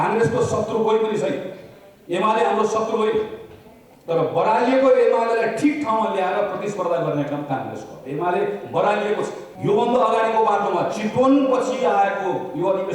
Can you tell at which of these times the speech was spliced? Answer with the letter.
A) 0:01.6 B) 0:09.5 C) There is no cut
B